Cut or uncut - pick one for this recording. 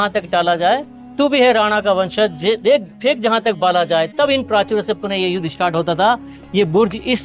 uncut